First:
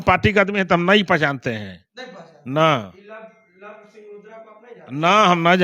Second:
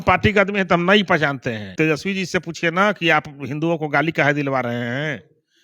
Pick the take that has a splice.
second; 1 cut; at 1.7 s

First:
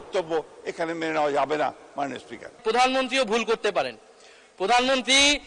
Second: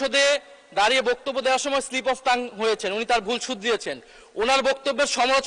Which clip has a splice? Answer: first; 1 cut; at 2.5 s

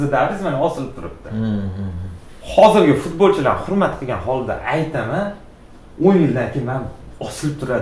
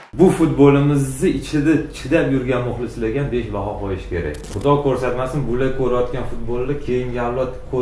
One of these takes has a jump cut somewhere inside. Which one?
second; 1 cut; at 4.5 s

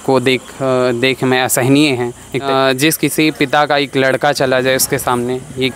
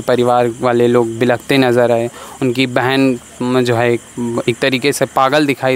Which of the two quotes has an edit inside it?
first; 1 cut; at 2.5 s

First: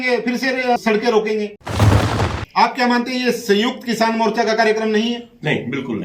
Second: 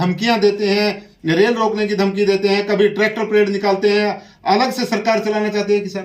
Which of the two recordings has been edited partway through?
first; 1 cut; at 2.1 s

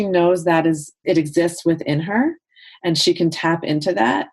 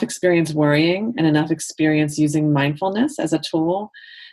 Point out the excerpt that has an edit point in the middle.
first; 1 cut; at 1.0 s

